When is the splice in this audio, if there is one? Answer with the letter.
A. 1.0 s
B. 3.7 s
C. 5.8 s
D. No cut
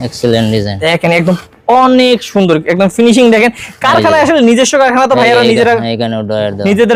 D